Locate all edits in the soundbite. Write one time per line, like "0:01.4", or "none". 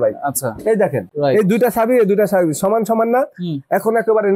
0:01.1